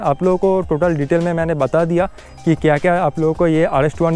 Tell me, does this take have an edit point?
no; 0 cuts

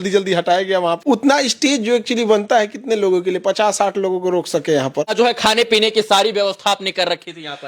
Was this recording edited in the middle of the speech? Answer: yes; 2 cuts; at 1.0 s, 5.1 s

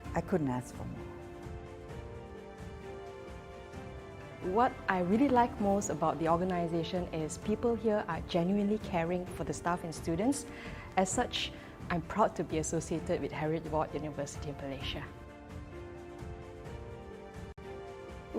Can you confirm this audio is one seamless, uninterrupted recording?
no; 2 cuts; at 15.4 s, 17.6 s

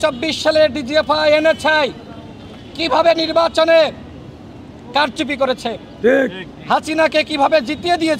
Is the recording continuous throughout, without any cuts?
yes; 0 cuts

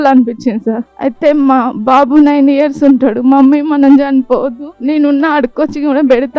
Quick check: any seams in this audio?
yes; 2 cuts; at 0.9 s, 4.7 s

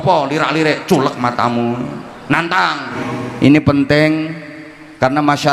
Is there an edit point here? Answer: yes; 1 cut; at 3.0 s

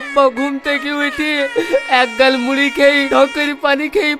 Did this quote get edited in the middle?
no; 0 cuts

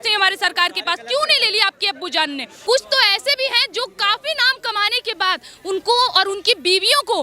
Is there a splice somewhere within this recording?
yes; 1 cut; at 2.6 s

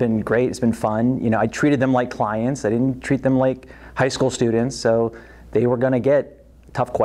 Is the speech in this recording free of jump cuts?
yes; 0 cuts

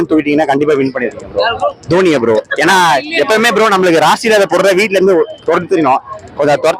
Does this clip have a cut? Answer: no; 0 cuts

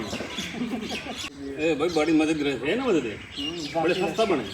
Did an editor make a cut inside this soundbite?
yes; 1 cut; at 1.3 s

